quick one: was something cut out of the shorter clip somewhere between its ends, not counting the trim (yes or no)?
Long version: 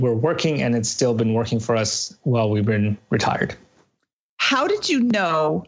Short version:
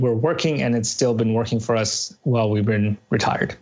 no